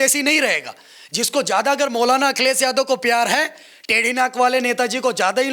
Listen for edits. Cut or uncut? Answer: uncut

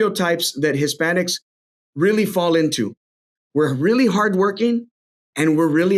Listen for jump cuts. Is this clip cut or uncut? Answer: uncut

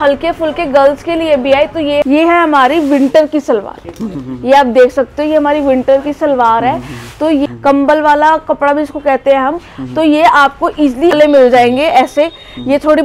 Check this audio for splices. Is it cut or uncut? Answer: cut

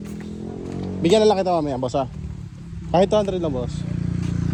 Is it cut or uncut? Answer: uncut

